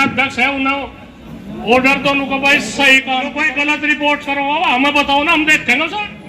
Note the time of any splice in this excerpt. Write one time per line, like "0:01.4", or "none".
0:03.5